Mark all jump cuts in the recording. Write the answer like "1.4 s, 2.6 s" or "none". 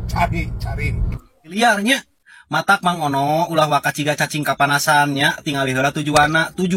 1.3 s